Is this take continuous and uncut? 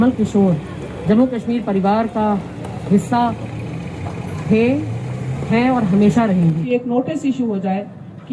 no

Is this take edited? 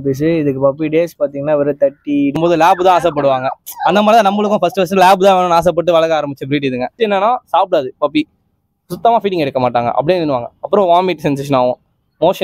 yes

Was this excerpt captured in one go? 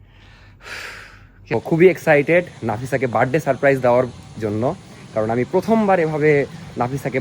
no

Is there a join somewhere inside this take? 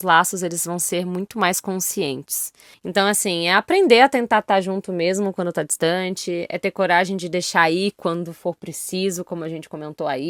no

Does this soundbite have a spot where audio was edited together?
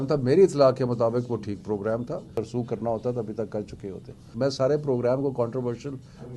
yes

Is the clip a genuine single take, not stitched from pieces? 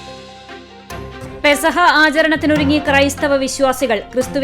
no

